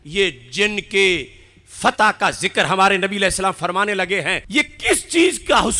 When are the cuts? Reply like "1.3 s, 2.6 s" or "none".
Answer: 4.4 s